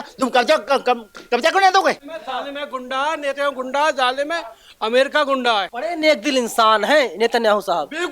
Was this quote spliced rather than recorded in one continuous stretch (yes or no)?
yes